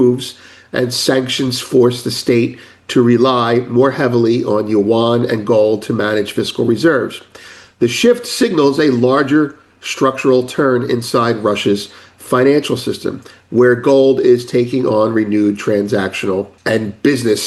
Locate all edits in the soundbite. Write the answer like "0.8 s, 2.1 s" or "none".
16.5 s